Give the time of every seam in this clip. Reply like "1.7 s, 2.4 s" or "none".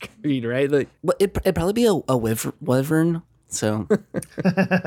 0.9 s, 3.8 s